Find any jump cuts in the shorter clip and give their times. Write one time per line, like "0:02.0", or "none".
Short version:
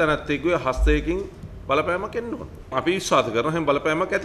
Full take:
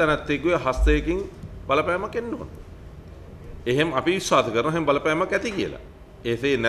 0:02.7